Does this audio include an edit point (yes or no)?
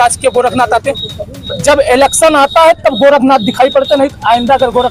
no